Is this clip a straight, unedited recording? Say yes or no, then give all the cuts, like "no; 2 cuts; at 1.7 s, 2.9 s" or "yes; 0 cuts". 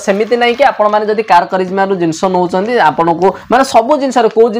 yes; 0 cuts